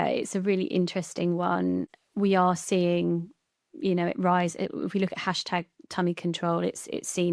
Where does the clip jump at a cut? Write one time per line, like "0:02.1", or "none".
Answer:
0:01.9